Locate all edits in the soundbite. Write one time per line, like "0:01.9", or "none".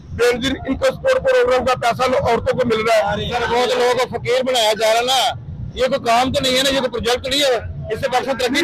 none